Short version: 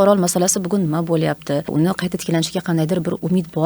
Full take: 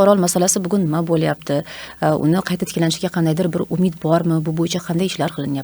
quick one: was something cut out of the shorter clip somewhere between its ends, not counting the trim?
yes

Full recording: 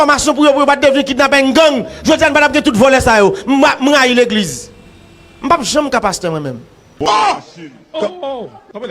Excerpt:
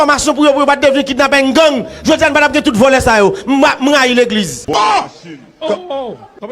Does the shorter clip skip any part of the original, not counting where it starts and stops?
yes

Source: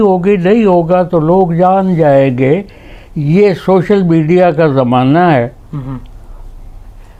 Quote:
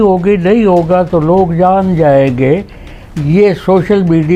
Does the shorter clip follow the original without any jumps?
yes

